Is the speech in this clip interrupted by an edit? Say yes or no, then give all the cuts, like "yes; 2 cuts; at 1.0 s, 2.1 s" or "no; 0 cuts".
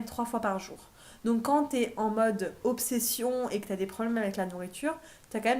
no; 0 cuts